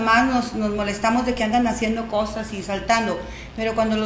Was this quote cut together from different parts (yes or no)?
yes